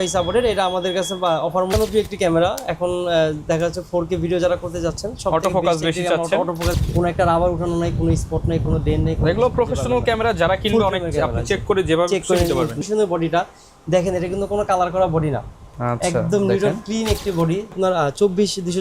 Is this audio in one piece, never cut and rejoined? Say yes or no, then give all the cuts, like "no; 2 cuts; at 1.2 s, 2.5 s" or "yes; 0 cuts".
no; 4 cuts; at 1.7 s, 6.8 s, 12.8 s, 17.7 s